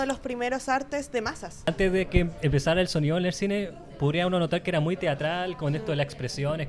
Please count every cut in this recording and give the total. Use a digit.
1